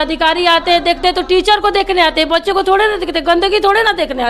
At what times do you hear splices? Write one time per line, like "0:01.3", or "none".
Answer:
none